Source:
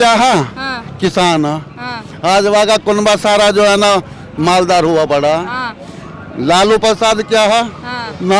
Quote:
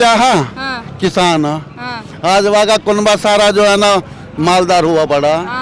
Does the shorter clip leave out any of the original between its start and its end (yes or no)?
no